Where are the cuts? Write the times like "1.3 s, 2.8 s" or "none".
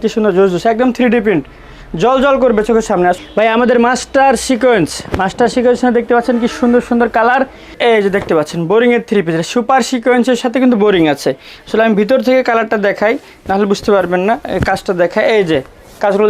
3.2 s, 7.6 s